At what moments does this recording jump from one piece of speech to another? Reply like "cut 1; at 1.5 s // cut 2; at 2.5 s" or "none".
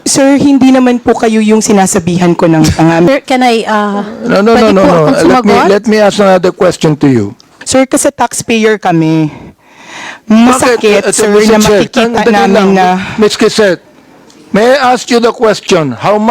cut 1; at 3.1 s // cut 2; at 7.5 s